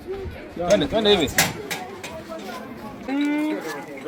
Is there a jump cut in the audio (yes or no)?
no